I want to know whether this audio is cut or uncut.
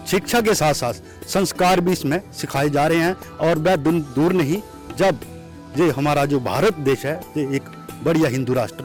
uncut